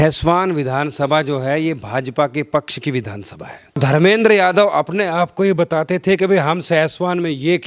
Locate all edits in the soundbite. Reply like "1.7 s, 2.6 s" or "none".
3.8 s